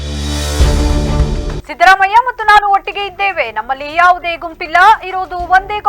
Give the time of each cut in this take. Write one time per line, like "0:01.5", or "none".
0:01.6